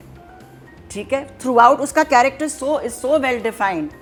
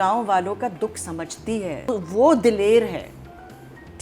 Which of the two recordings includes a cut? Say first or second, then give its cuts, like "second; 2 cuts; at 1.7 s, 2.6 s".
second; 1 cut; at 1.9 s